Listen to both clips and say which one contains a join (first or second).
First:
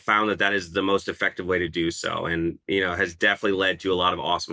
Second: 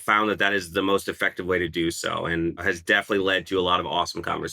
second